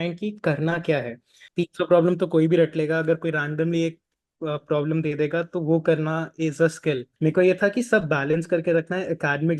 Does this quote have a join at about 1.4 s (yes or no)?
yes